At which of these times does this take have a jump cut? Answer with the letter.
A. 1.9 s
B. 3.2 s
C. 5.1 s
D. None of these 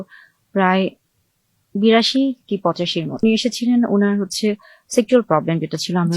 B